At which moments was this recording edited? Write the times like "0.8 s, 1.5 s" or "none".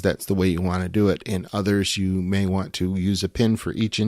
none